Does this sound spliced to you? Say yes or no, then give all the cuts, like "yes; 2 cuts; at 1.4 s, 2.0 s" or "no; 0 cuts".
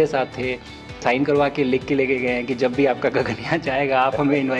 yes; 1 cut; at 1.0 s